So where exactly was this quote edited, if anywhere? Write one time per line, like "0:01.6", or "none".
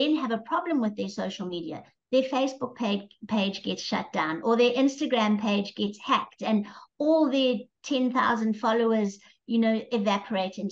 none